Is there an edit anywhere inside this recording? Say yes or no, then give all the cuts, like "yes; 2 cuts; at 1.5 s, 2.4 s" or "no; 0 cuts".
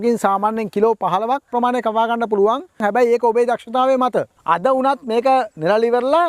yes; 2 cuts; at 2.8 s, 4.4 s